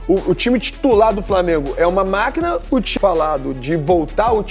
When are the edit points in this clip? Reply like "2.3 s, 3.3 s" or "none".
3.0 s